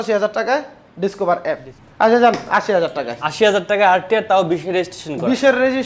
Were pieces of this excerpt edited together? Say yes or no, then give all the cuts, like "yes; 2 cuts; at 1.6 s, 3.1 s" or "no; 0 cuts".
yes; 1 cut; at 1.7 s